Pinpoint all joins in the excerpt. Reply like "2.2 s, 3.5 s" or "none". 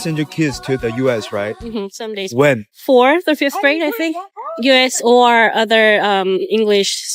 none